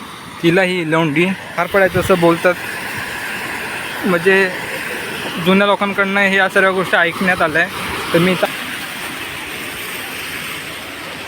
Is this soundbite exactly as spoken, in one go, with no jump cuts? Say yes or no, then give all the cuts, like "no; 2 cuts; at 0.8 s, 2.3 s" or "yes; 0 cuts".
no; 2 cuts; at 1.6 s, 8.5 s